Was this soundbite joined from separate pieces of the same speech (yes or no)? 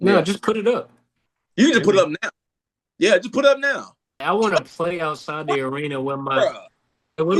yes